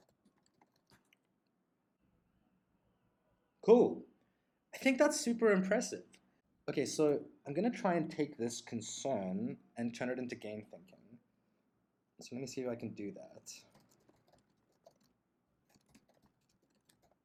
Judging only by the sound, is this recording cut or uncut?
uncut